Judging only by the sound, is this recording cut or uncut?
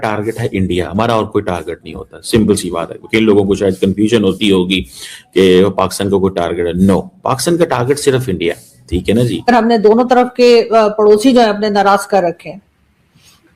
cut